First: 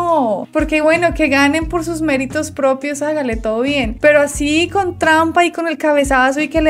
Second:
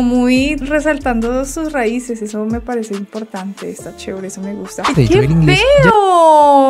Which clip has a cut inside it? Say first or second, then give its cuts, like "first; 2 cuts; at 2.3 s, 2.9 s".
second; 1 cut; at 5.0 s